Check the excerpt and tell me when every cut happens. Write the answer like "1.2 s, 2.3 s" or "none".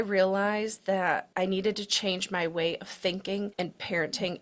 1.3 s, 3.5 s